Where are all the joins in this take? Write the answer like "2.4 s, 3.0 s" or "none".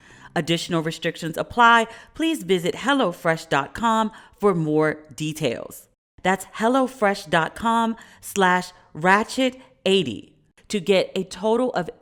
none